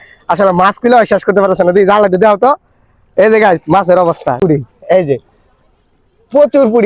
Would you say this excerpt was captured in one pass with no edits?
no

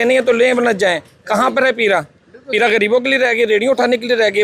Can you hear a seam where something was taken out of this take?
no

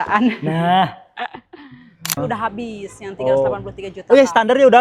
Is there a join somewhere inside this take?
yes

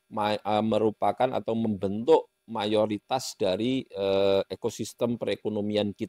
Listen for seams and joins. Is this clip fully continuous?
yes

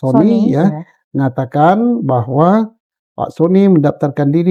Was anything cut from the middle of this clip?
no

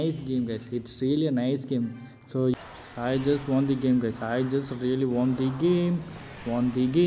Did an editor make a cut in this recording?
yes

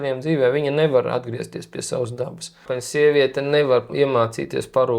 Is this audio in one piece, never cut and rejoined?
no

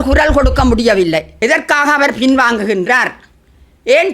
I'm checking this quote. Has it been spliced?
yes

